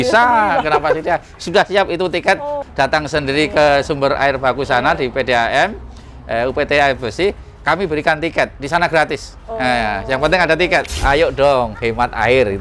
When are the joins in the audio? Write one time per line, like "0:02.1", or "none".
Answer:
0:02.6
0:10.9